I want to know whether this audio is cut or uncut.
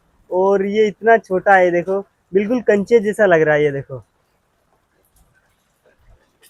uncut